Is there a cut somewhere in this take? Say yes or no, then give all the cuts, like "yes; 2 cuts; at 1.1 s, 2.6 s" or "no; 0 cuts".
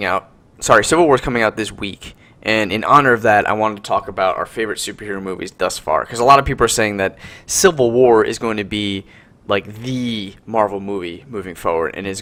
no; 0 cuts